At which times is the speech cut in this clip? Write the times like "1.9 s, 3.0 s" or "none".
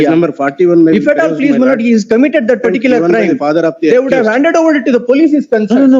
none